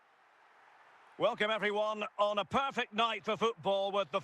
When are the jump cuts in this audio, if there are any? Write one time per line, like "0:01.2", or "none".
0:01.2